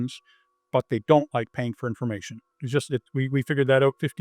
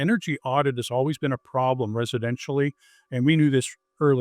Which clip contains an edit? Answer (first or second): first